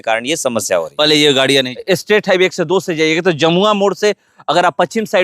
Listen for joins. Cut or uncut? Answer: cut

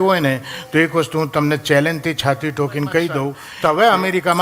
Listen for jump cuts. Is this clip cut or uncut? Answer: cut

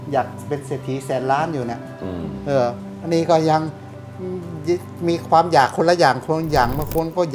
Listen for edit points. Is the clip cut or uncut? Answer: uncut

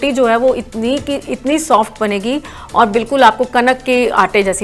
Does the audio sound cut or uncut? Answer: uncut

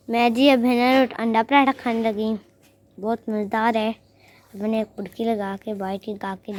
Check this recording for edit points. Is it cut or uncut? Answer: uncut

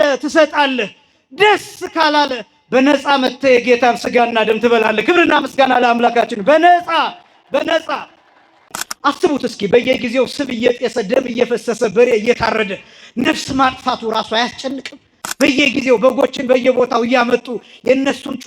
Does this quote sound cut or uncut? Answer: cut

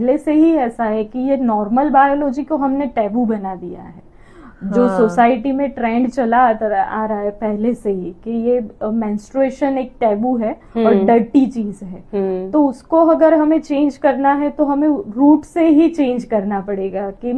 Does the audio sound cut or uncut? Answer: uncut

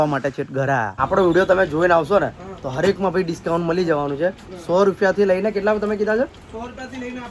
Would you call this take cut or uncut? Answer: cut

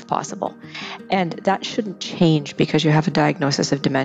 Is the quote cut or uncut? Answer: uncut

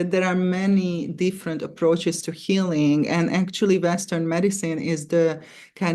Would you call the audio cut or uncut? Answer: uncut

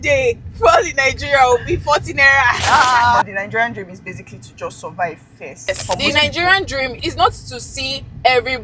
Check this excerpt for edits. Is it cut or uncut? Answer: cut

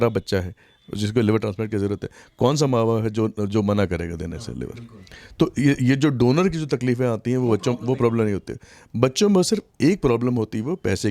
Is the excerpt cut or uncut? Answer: uncut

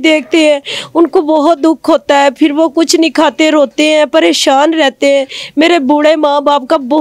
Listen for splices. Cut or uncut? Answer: uncut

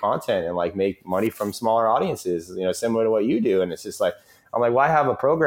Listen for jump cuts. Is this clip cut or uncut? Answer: uncut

